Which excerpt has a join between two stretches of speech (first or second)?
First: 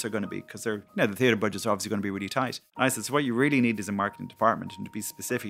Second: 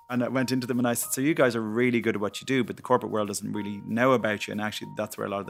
first